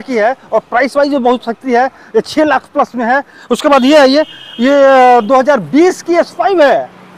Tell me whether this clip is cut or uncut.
uncut